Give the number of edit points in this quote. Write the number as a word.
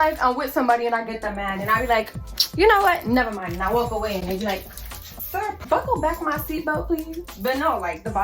two